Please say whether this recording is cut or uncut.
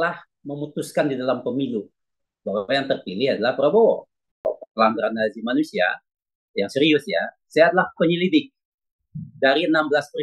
cut